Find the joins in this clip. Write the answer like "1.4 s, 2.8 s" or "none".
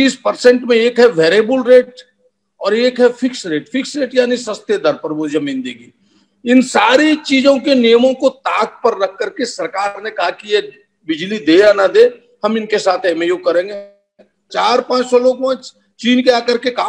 14.4 s

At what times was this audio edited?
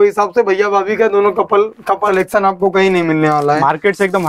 2.1 s

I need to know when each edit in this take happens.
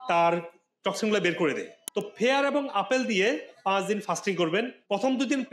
none

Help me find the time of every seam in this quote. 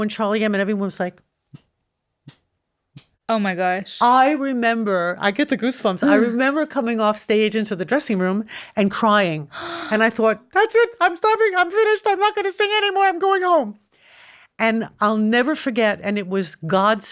none

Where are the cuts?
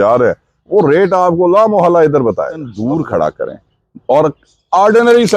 2.7 s

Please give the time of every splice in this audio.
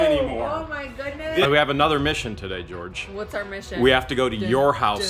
1.4 s

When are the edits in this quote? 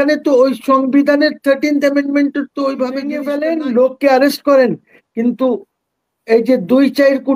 3.3 s

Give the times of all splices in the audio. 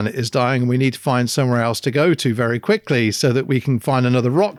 none

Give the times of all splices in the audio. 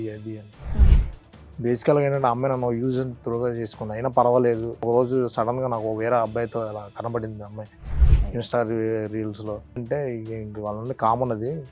4.8 s, 9.8 s

